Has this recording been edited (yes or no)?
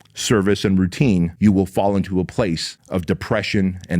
yes